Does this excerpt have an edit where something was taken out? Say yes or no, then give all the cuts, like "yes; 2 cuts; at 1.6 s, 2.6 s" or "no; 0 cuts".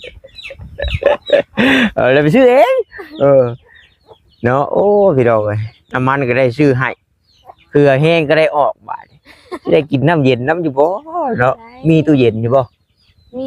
no; 0 cuts